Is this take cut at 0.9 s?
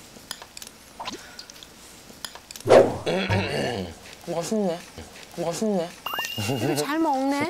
yes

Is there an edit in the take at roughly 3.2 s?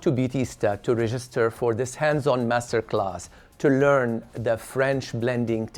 no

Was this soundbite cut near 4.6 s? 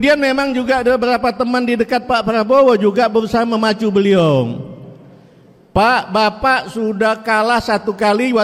no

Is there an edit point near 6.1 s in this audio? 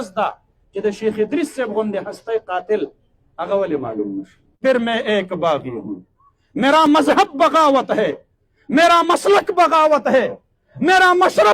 no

